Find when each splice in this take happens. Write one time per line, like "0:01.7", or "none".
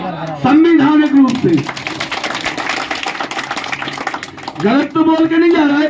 none